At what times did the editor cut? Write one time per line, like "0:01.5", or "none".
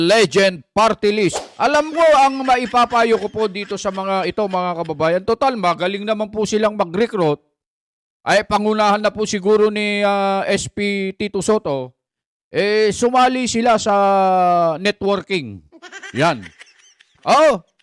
0:01.4